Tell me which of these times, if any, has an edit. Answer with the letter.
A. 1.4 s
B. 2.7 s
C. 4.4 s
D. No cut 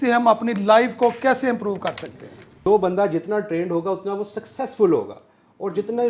B